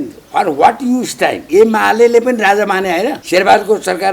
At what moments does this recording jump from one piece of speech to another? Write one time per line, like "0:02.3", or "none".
0:01.4
0:03.2